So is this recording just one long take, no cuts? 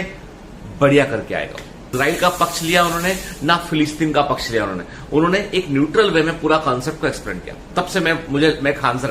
no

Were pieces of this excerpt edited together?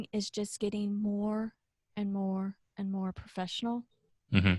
no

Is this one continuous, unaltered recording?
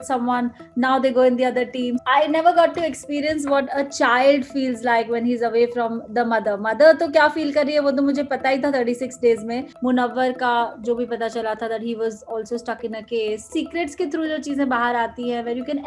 no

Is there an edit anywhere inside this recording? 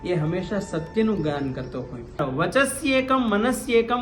yes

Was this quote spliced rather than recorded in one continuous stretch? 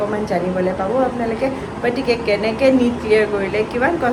no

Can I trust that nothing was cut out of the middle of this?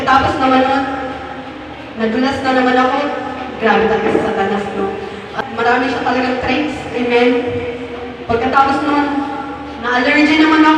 no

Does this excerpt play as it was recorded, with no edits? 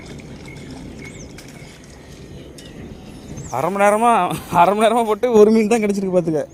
yes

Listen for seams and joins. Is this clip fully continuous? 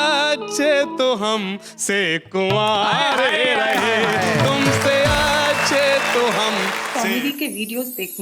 no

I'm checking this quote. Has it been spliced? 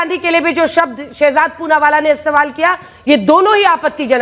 no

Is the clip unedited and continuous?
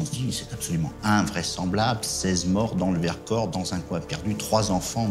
yes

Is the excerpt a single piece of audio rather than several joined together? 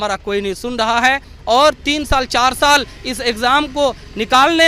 yes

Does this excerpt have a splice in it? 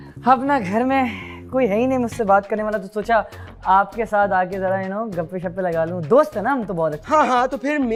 no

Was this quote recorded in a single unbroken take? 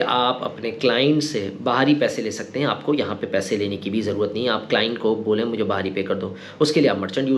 yes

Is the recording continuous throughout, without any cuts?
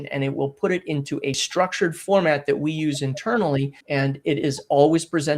no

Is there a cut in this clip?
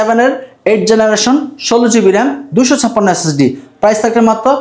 no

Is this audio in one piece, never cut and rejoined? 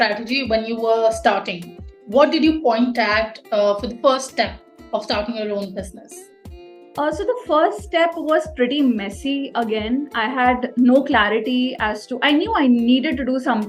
yes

